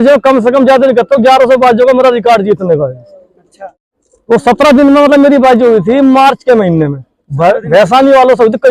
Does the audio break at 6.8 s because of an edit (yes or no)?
no